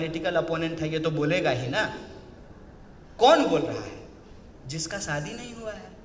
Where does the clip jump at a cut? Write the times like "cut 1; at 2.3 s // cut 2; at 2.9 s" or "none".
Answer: none